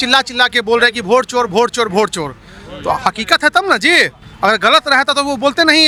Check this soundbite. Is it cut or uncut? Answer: uncut